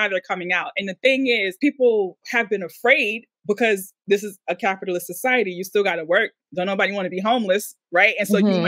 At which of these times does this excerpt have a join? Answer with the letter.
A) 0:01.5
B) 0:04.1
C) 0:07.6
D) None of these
A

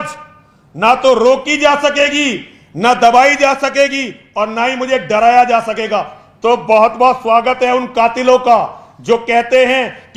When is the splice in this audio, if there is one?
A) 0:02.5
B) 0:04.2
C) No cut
C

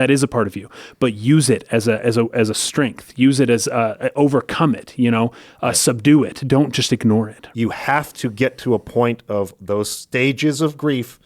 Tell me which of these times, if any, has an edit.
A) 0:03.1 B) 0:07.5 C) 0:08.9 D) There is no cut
B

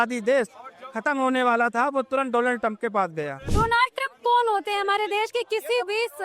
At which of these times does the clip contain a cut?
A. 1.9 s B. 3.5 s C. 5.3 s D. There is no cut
B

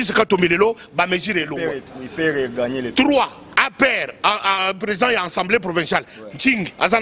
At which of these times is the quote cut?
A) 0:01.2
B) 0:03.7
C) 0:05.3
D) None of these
D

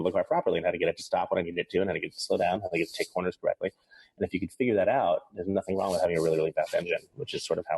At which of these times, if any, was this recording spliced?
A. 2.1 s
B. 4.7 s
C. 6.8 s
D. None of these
D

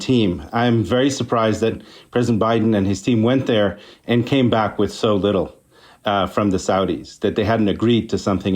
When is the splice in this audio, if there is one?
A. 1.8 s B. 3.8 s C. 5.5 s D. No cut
A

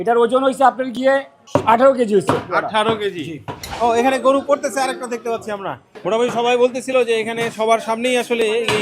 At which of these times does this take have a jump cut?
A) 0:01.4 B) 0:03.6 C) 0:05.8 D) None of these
B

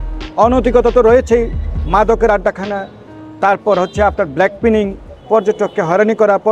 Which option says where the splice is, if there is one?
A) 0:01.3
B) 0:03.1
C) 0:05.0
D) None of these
D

